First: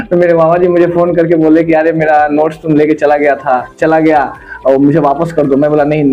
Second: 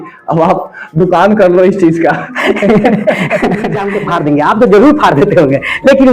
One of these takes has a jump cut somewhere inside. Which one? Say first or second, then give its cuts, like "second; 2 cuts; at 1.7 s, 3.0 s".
second; 1 cut; at 3.9 s